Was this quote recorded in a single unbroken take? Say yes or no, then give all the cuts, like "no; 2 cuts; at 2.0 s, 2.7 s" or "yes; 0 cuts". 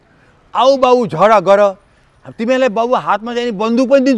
yes; 0 cuts